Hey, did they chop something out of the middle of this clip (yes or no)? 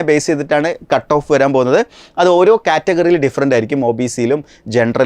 no